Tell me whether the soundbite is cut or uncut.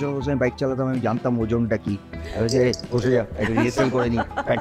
uncut